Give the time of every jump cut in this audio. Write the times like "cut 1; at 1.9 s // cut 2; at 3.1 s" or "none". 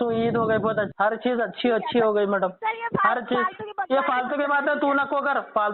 cut 1; at 0.9 s